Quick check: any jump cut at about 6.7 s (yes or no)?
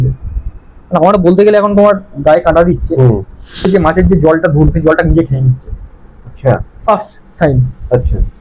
no